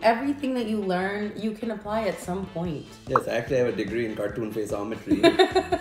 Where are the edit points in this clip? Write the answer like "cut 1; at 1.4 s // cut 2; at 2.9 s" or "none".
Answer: cut 1; at 2.9 s